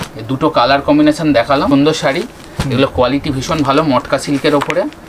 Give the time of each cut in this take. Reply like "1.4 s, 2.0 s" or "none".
1.7 s